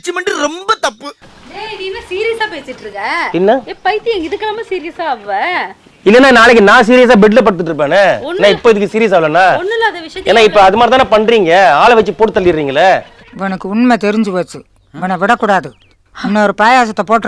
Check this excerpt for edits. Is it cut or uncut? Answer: cut